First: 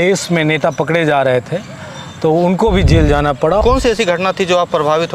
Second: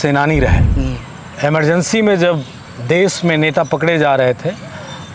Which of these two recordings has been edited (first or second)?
first